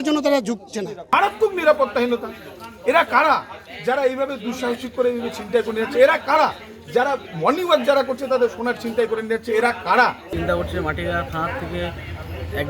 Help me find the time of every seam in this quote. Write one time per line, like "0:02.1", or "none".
0:01.1
0:10.3